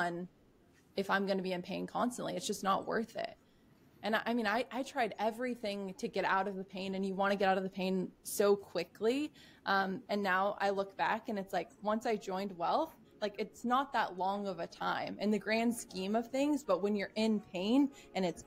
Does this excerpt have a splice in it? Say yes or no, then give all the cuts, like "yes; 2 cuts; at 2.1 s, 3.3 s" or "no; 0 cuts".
no; 0 cuts